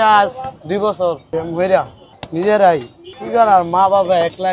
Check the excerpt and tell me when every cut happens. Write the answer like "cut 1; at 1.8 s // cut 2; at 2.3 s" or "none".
cut 1; at 1.2 s // cut 2; at 2.0 s